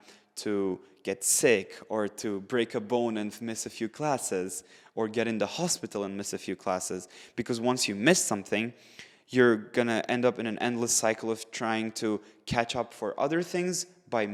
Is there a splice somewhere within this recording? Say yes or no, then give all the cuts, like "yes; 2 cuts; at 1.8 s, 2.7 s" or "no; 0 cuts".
no; 0 cuts